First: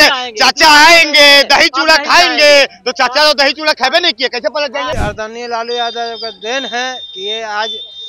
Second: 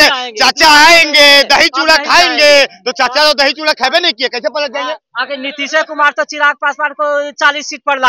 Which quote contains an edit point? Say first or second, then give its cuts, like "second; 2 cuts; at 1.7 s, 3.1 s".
first; 1 cut; at 5.0 s